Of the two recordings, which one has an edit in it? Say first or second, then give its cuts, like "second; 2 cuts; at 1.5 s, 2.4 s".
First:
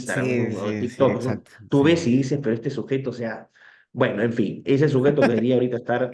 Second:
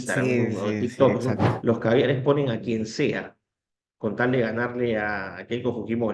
second; 1 cut; at 1.5 s